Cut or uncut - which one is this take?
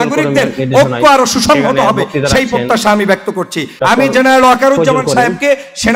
cut